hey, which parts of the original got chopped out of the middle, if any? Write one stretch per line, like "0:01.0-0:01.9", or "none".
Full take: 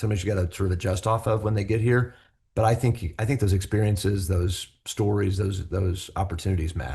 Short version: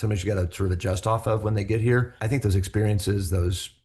0:02.2-0:03.1